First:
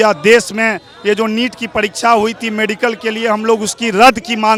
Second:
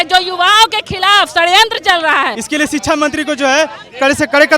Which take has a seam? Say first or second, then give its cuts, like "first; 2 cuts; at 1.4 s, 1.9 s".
second; 1 cut; at 2.4 s